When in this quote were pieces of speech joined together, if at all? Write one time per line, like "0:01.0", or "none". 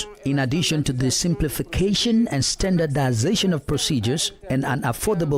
0:04.3